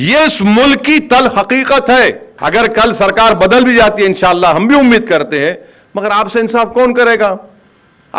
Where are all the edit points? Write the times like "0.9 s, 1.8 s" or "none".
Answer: 2.3 s